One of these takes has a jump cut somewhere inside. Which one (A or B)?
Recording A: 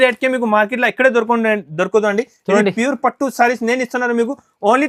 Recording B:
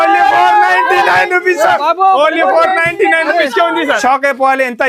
B